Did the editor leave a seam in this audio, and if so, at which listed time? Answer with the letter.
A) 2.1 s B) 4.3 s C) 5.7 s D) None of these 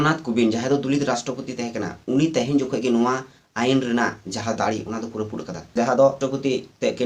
C